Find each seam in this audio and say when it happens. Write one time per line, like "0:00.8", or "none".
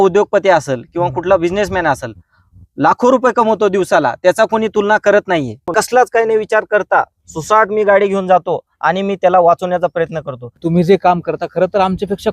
0:05.7
0:10.6